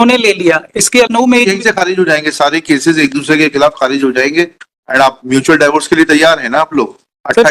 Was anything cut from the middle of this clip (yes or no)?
yes